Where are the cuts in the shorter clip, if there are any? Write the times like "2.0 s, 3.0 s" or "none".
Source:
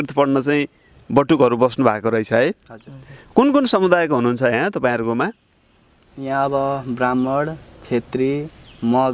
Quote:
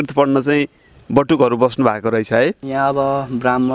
2.6 s